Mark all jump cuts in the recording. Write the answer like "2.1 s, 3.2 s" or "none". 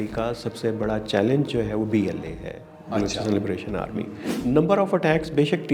4.3 s